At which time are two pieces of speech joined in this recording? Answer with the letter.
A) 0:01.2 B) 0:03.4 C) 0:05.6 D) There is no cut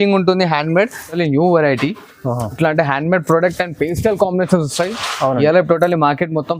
A